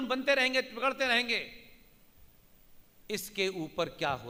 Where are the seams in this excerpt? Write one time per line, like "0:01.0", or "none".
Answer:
none